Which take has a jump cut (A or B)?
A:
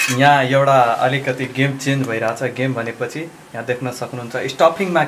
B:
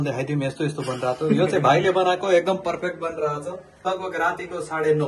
B